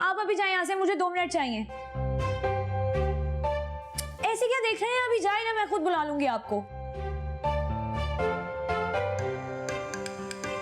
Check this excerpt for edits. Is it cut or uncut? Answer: uncut